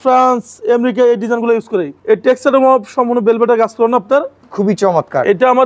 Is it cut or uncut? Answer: cut